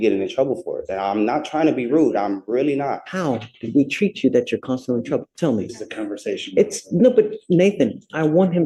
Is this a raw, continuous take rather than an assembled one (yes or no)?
yes